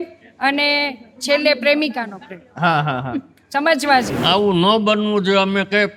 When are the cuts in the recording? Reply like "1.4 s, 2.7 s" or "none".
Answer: 4.1 s